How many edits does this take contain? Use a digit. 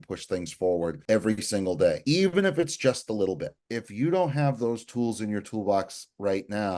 3